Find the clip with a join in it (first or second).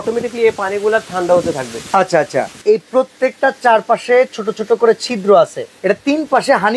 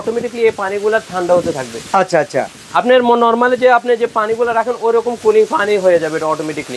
first